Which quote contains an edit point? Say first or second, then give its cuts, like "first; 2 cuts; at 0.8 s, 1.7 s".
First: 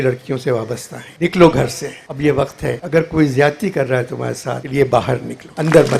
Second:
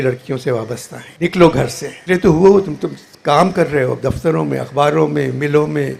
first; 1 cut; at 1.9 s